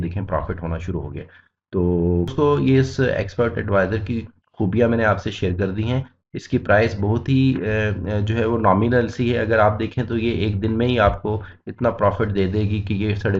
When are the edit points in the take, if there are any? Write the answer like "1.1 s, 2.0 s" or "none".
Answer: 2.3 s